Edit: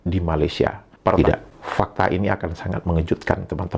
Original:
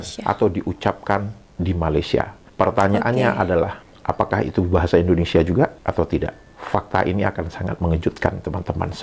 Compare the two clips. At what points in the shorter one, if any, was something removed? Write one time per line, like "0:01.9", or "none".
0:01.2